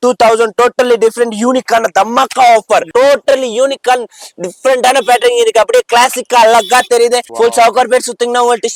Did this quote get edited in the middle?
yes; 2 cuts; at 2.9 s, 7.3 s

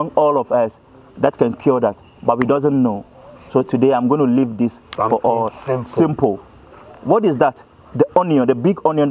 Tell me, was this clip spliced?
no; 0 cuts

